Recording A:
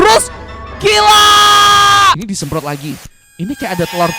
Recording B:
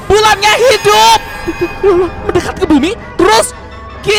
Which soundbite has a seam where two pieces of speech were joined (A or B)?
A